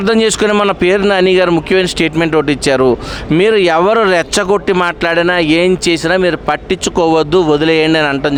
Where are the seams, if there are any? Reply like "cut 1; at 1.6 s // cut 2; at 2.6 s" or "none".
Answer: none